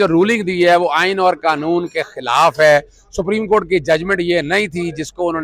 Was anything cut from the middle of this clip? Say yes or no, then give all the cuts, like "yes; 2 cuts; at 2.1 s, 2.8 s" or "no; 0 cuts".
no; 0 cuts